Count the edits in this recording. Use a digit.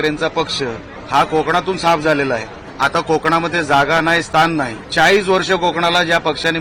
3